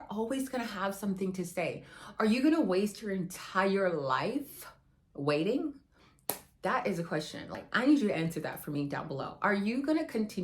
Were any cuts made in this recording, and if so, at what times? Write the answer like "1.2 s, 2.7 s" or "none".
7.7 s